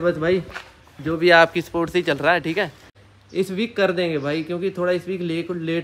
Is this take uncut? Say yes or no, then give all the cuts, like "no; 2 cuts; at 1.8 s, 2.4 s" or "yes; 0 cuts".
no; 1 cut; at 2.9 s